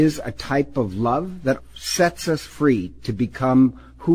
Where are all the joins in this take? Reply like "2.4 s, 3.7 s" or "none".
1.6 s